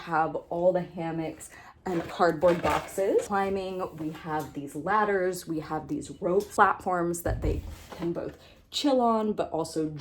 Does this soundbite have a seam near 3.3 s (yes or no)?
yes